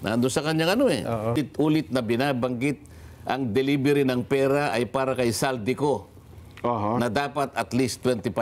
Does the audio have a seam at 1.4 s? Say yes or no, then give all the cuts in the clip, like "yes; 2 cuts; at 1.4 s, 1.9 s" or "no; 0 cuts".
yes; 1 cut; at 1.4 s